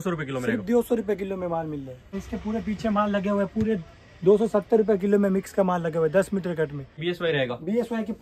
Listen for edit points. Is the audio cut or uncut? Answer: cut